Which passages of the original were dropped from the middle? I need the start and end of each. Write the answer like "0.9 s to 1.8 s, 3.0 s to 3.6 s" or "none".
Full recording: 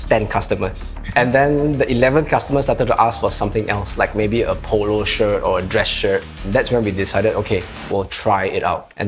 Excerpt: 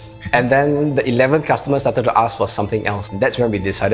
3.8 s to 6.3 s